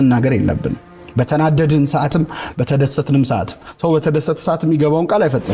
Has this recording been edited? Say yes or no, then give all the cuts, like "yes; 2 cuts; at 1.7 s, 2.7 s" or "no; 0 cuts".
no; 0 cuts